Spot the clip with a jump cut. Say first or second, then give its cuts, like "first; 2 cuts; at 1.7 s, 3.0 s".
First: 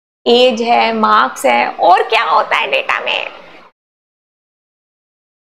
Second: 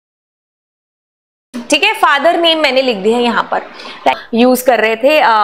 second; 1 cut; at 4.1 s